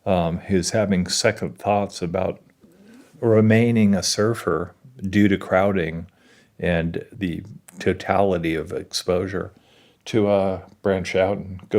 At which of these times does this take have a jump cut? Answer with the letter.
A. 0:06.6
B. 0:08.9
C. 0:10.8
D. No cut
B